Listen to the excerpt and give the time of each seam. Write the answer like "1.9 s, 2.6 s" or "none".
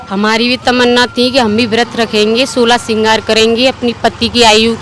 none